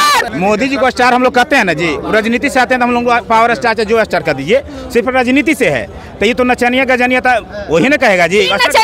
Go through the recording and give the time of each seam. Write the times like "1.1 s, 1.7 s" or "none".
none

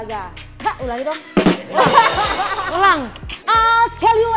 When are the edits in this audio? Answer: 3.4 s

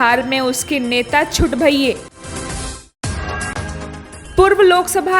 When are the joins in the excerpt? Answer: 2.1 s, 4.1 s

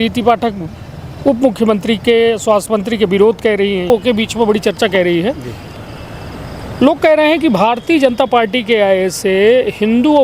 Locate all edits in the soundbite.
3.9 s

